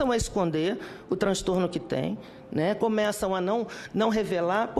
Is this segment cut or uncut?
uncut